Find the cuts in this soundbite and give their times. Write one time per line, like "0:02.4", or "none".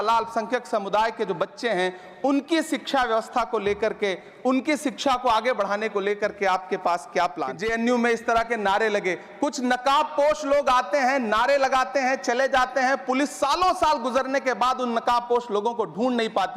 0:07.6

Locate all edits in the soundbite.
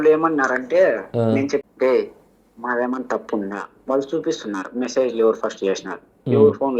0:01.6

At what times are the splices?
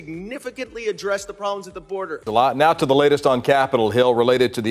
0:02.2

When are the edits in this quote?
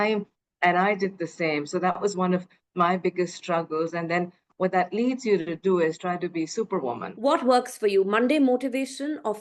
0:07.1

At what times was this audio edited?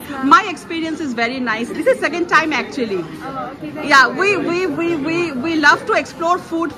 none

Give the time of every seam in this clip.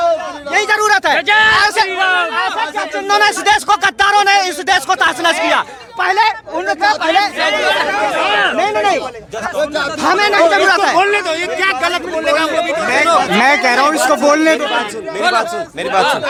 none

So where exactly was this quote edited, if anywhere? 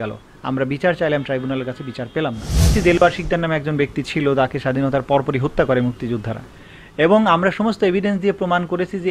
0:02.5

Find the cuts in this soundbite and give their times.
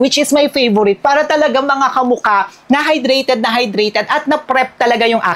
none

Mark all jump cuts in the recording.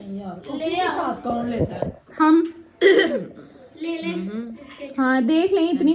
none

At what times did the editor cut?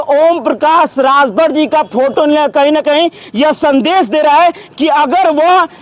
none

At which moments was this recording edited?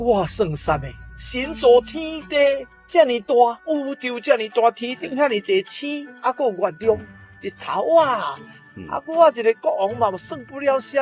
none

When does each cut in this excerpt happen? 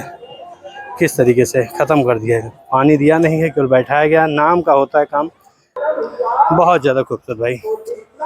0:05.8

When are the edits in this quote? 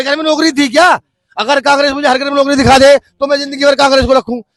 none

